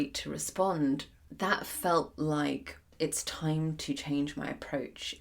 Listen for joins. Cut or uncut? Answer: cut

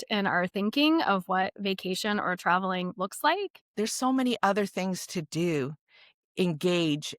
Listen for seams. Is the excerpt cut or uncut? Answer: cut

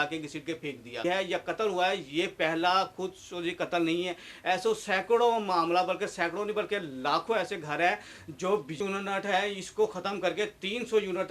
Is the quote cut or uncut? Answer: cut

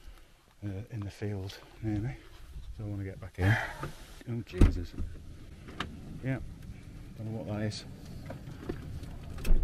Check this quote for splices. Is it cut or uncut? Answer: uncut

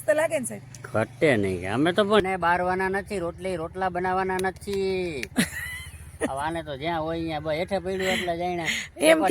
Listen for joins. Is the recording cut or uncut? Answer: cut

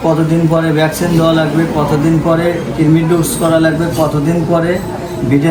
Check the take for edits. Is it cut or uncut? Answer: uncut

